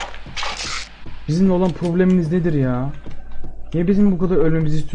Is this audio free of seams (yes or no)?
yes